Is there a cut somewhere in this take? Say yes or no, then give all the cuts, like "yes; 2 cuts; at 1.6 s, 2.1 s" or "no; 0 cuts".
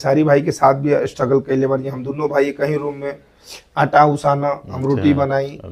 no; 0 cuts